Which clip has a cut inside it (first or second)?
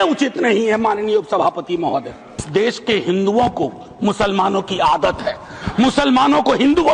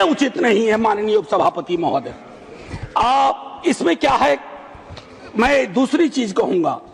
first